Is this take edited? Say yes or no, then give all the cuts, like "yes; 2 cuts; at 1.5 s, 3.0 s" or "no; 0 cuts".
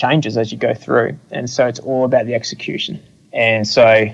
yes; 1 cut; at 2.9 s